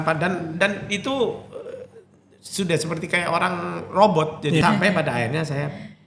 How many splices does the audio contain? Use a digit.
1